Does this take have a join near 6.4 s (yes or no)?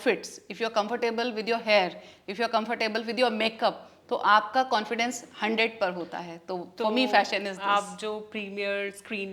no